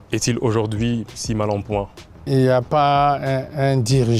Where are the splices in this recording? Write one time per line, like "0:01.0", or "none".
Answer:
0:02.2